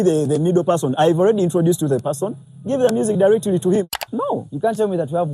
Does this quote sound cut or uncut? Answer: cut